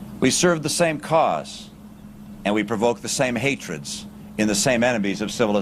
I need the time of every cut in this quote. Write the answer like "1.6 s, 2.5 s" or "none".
none